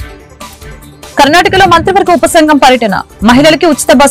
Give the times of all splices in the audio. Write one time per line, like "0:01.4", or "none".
none